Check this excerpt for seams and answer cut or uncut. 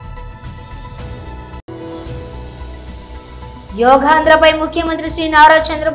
cut